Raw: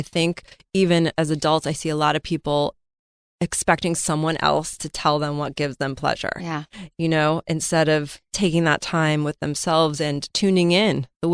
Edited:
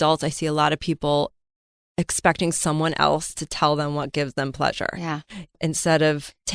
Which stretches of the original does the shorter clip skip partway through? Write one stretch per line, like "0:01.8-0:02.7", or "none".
0:07.0-0:07.4

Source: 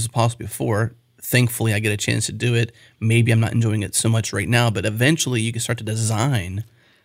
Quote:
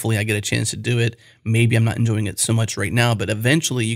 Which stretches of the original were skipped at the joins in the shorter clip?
none

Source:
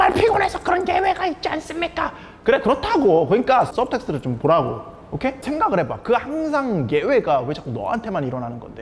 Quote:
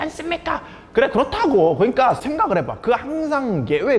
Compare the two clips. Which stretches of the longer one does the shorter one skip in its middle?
0:03.7-0:05.4

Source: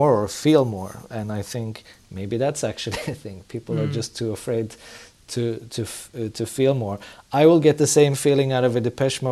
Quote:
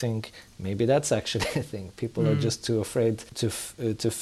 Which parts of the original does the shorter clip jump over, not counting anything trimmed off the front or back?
0:04.8-0:05.7

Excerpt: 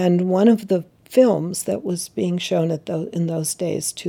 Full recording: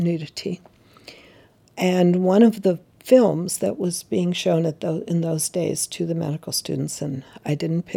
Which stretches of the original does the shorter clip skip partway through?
none

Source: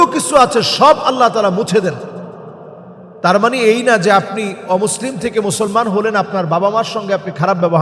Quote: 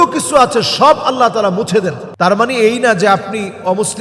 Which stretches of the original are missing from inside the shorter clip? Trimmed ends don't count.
0:02.0-0:03.1

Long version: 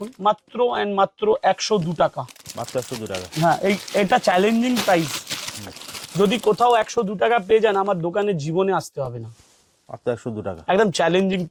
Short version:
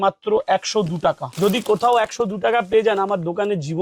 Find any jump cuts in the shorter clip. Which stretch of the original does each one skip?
0:02.2-0:06.0

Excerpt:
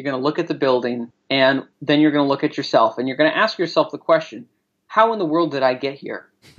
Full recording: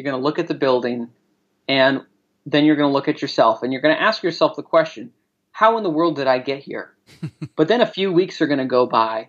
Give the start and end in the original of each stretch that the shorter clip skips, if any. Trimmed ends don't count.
0:01.5-0:02.2

